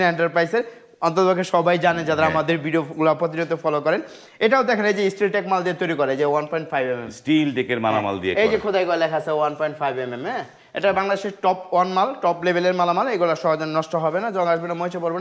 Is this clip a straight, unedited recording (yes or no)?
yes